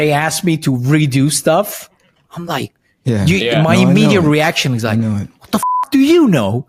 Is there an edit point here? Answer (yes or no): no